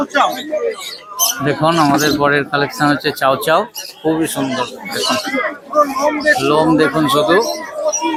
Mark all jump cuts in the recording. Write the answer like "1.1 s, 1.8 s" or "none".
none